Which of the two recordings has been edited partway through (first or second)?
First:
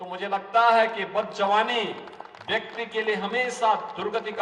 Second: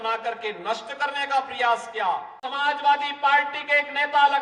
second